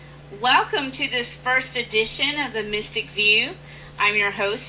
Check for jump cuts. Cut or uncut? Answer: uncut